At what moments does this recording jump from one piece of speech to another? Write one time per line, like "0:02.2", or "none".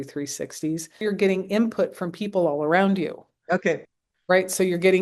0:01.0